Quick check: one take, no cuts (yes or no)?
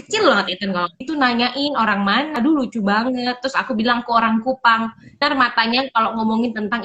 no